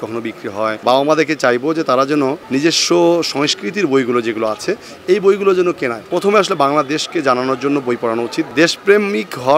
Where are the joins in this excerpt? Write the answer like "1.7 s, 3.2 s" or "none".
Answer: 0.8 s, 2.4 s, 6.0 s, 8.5 s